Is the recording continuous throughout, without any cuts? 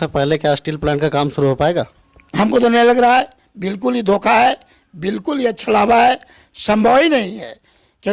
yes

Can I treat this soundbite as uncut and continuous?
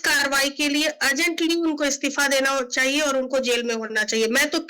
yes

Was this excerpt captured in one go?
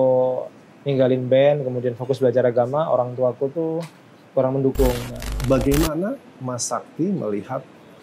no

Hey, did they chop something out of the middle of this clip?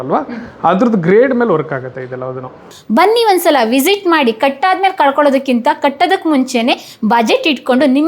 yes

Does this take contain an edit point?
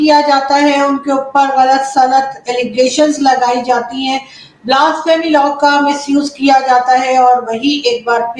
no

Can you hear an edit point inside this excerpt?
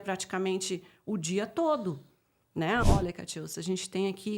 yes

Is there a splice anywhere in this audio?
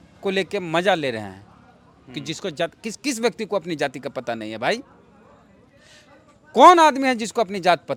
no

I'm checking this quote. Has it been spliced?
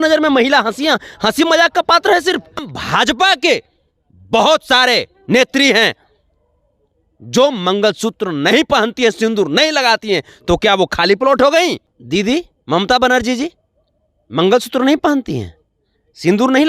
yes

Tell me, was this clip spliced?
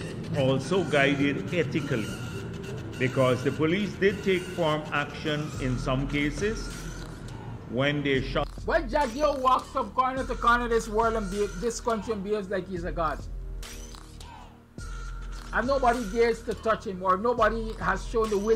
yes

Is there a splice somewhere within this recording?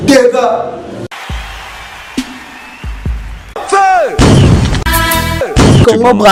no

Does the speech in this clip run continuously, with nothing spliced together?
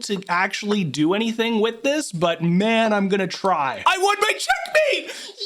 no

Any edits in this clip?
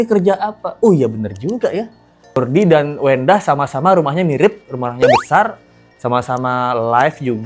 yes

